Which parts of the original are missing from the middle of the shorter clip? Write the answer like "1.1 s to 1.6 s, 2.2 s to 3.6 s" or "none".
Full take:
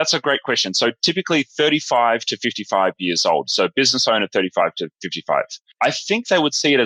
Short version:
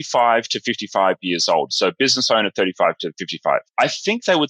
5.2 s to 5.5 s